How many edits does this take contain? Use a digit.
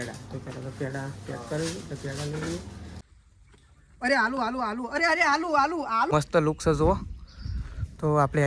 2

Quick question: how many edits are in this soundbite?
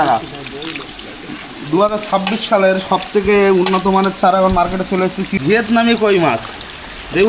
1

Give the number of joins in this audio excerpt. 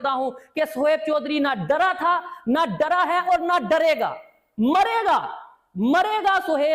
0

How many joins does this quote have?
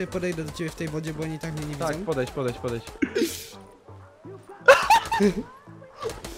1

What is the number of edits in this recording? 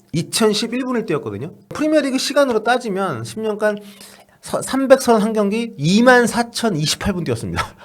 1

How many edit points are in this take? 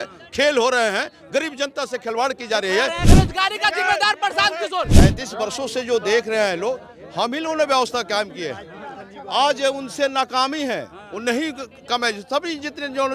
2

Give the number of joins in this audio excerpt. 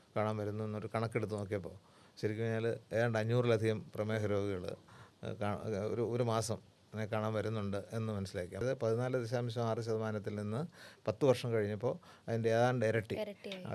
1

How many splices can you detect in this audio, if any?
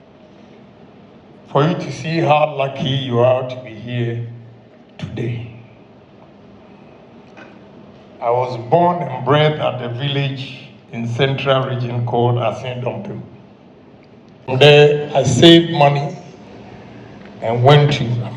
1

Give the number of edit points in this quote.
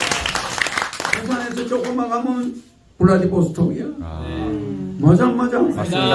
0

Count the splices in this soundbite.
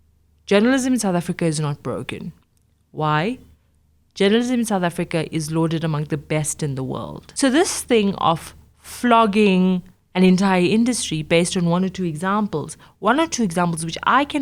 1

